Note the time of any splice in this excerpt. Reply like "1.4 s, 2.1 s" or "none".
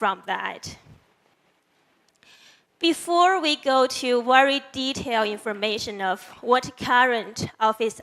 4.7 s